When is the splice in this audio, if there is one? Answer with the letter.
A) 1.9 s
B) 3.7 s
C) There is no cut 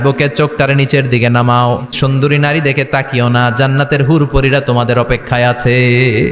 A